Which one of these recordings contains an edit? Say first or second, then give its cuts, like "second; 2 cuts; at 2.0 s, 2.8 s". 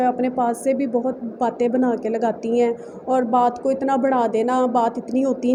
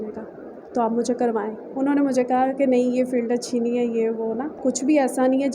second; 1 cut; at 4.6 s